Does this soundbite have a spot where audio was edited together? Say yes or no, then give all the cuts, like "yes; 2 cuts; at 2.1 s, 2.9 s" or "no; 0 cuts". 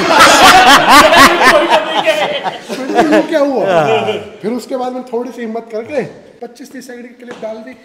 yes; 1 cut; at 6.2 s